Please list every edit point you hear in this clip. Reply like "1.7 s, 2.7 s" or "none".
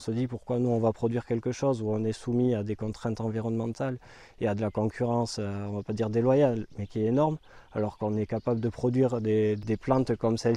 9.6 s